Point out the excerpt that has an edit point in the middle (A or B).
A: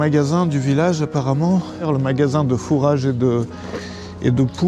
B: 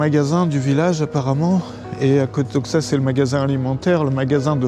A